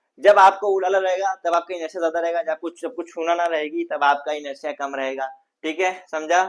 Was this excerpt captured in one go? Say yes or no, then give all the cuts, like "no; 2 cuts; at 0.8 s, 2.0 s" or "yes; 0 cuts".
yes; 0 cuts